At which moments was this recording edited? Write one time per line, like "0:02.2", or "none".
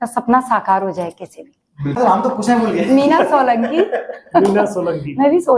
0:02.0